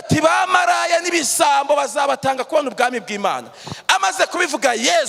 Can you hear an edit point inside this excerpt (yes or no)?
no